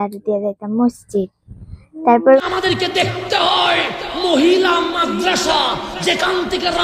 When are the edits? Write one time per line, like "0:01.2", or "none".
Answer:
0:02.4